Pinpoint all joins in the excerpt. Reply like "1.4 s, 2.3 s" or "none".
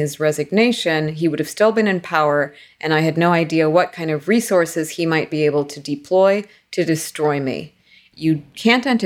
8.0 s